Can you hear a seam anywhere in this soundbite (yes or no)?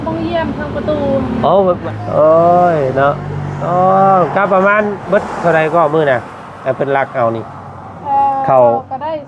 yes